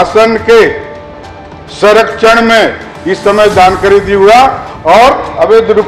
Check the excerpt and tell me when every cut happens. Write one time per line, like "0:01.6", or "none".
none